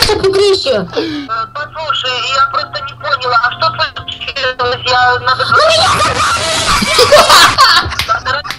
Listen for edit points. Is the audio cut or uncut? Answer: cut